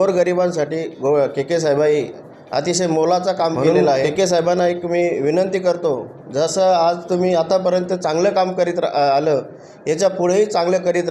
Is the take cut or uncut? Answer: cut